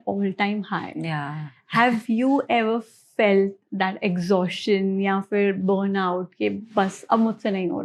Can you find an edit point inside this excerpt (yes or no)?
no